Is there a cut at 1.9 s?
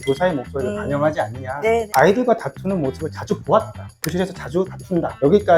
yes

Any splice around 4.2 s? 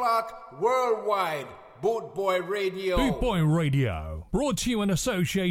no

